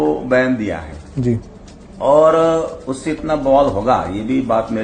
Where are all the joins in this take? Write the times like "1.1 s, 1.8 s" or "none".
none